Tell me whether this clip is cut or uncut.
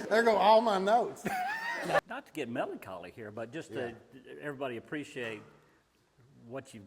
cut